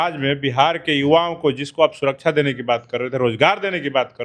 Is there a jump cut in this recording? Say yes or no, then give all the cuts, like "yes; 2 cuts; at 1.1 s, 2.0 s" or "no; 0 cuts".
no; 0 cuts